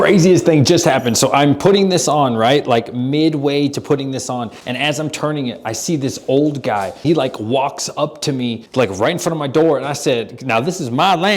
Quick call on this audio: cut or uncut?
cut